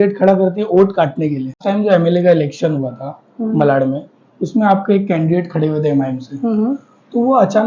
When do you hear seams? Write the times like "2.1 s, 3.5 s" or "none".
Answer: 1.6 s

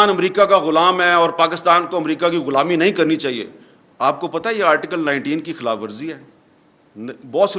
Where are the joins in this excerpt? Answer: none

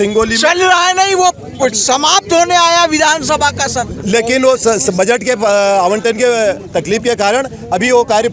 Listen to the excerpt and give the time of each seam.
none

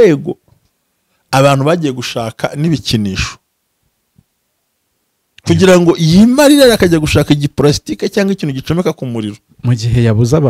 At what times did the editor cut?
none

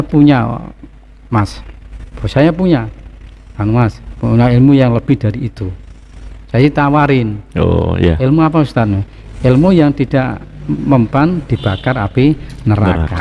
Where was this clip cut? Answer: none

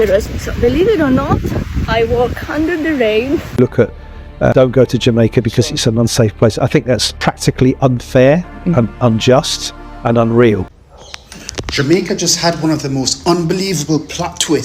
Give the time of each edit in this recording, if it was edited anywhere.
3.5 s, 10.6 s

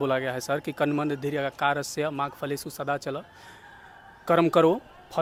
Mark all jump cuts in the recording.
none

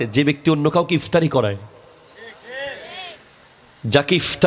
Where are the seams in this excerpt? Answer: none

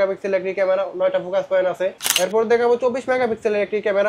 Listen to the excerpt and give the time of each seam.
2.0 s

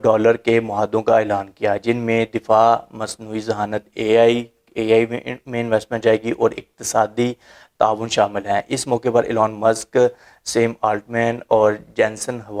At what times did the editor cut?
none

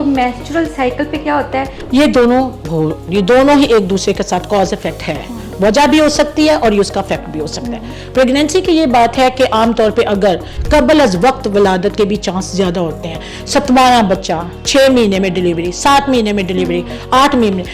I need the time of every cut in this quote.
1.8 s, 10.5 s

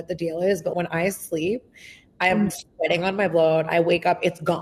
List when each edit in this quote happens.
none

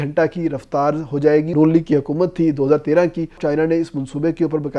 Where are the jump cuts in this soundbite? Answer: 1.5 s, 3.4 s

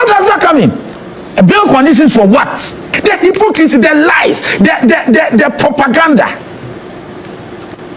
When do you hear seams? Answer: 2.9 s

